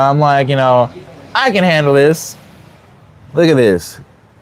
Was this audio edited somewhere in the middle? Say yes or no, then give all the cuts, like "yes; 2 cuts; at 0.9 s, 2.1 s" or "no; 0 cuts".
no; 0 cuts